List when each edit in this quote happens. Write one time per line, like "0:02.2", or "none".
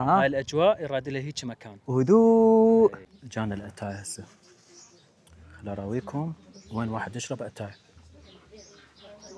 0:03.1